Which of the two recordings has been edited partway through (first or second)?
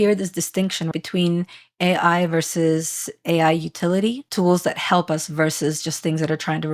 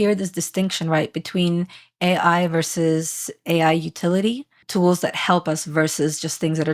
first